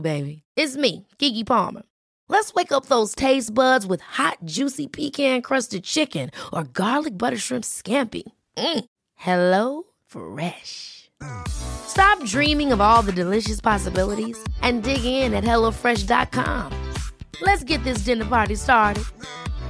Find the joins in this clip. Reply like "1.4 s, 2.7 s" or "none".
none